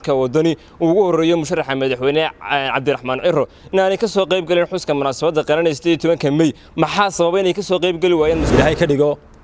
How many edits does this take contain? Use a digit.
1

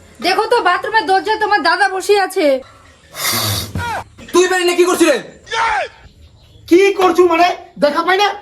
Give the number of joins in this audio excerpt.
0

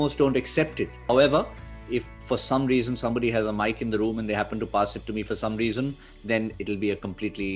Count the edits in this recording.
1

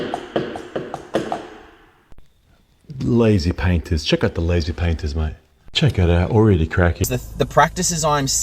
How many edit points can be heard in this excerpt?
1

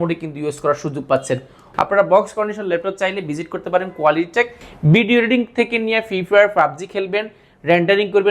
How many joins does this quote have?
2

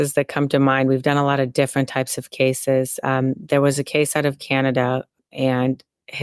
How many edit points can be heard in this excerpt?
1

